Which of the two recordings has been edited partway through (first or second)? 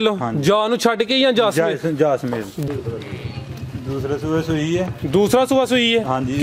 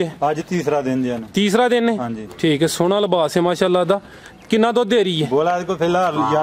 first